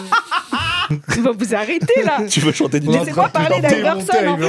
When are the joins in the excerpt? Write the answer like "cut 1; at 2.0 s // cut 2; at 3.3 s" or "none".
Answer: none